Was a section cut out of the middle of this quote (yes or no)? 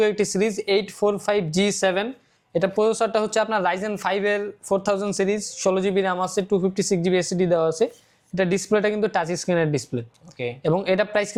no